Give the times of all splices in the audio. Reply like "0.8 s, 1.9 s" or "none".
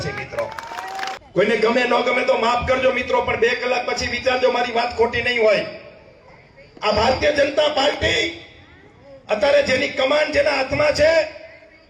1.2 s

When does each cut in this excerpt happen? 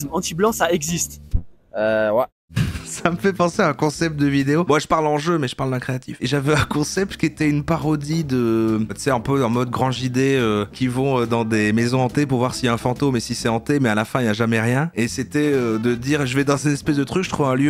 2.4 s

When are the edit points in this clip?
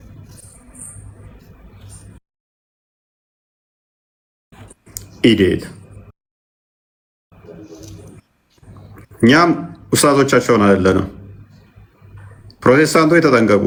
none

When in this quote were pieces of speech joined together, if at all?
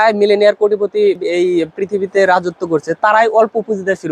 1.2 s

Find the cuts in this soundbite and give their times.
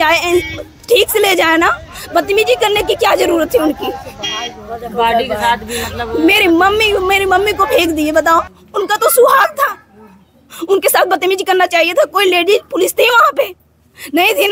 none

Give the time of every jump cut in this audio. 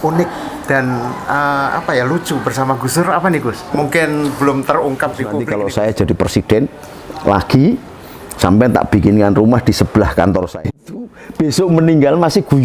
3.7 s, 5.4 s, 10.8 s

